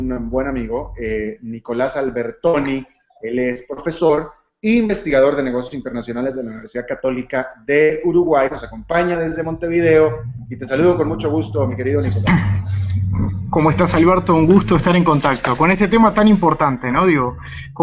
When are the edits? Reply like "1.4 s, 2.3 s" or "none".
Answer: 8.3 s